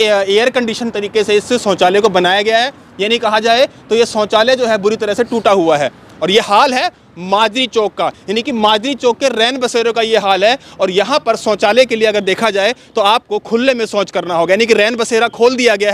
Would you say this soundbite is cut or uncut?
uncut